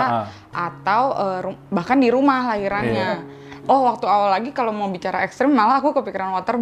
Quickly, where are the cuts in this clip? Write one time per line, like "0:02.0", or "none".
none